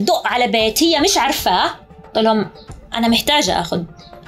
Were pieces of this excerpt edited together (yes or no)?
no